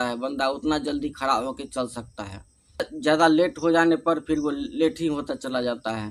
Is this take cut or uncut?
uncut